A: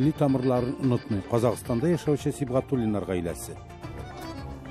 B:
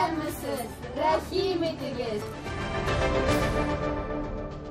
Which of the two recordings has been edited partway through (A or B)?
B